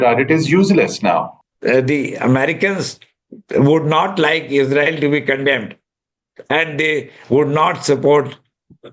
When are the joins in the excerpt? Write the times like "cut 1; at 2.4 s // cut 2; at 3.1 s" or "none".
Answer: cut 1; at 1.4 s